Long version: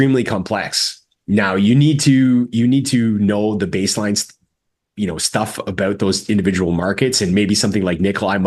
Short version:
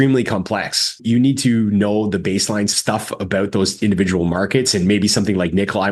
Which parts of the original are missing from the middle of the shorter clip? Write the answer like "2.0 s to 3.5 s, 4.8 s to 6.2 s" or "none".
1.0 s to 2.5 s, 4.3 s to 5.2 s